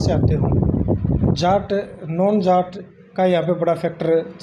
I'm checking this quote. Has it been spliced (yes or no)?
no